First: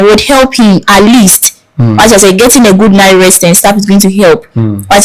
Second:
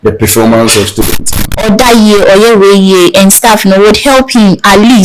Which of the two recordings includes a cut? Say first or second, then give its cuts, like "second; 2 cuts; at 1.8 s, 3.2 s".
second; 1 cut; at 1.4 s